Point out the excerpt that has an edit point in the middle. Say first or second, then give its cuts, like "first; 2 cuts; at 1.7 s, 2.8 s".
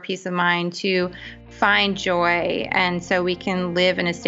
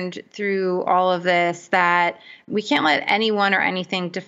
second; 1 cut; at 2.4 s